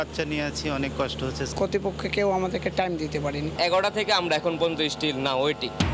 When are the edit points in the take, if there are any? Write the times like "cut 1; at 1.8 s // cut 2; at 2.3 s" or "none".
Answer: none

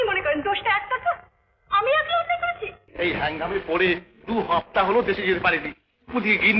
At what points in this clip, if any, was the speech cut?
cut 1; at 2.8 s

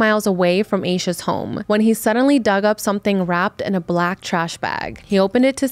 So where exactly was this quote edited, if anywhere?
cut 1; at 1.5 s

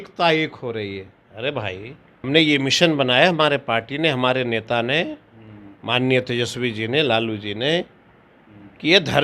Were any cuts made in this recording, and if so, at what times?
cut 1; at 2.2 s

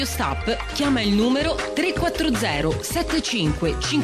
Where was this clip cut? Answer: none

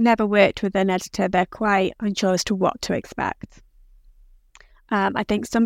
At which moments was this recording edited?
none

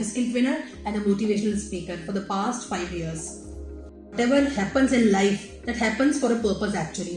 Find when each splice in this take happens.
cut 1; at 4.1 s

